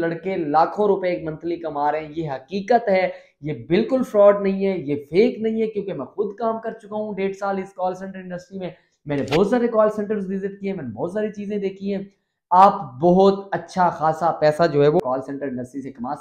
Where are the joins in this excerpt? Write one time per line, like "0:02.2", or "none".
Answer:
0:15.0